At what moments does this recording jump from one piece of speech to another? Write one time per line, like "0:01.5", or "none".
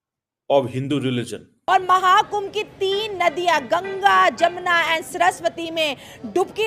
0:01.5